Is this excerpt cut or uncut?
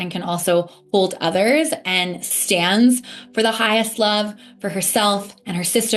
uncut